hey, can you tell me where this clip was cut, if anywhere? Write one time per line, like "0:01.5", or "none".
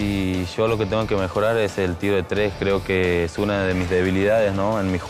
none